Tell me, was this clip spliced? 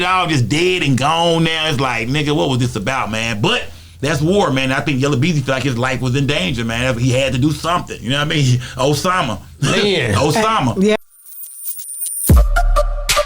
yes; 1 cut; at 11.0 s

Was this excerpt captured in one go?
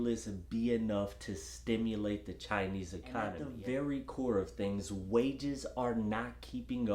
no; 1 cut; at 3.5 s

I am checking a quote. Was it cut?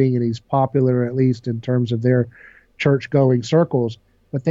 no; 0 cuts

